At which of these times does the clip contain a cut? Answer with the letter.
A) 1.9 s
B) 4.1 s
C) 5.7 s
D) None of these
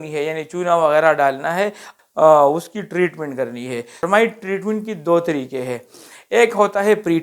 A